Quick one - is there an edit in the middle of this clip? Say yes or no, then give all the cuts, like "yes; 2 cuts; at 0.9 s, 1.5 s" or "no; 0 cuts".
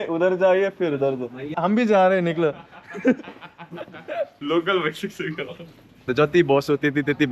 yes; 1 cut; at 6.1 s